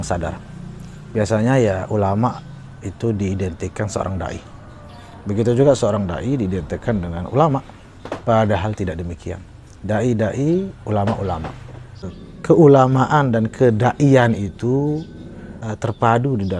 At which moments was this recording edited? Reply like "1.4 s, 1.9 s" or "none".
12.1 s, 15.6 s